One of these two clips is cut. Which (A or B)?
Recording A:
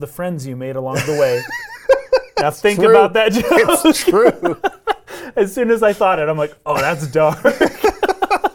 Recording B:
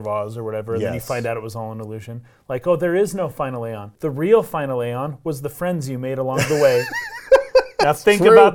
B